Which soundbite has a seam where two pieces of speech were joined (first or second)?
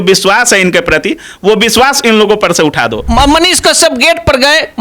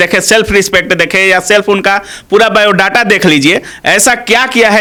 first